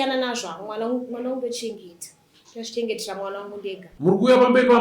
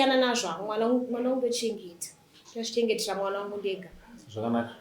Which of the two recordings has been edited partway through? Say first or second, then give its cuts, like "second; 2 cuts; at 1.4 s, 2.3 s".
first; 1 cut; at 3.9 s